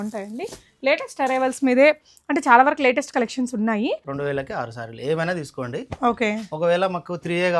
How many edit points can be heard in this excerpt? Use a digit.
1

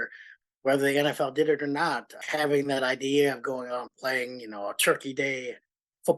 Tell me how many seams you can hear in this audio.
1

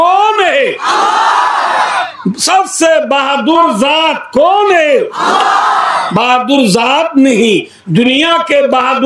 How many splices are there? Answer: 0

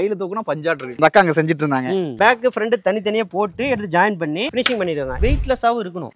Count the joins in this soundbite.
2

